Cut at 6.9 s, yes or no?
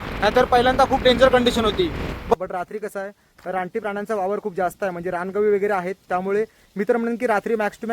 no